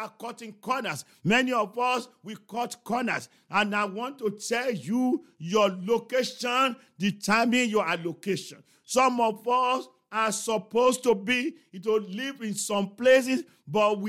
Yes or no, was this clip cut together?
no